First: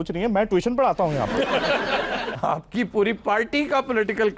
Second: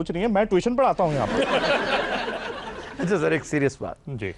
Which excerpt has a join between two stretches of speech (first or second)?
first